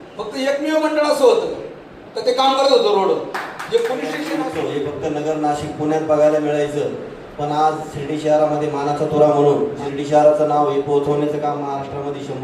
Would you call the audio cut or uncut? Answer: cut